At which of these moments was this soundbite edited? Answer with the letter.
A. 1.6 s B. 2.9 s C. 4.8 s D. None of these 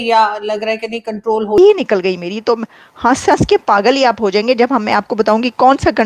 A